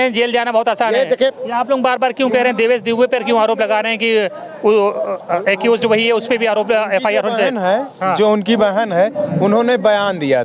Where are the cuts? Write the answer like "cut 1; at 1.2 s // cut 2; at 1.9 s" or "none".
cut 1; at 1.3 s